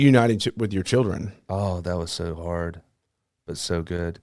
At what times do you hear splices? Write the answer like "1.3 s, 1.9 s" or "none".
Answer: 1.4 s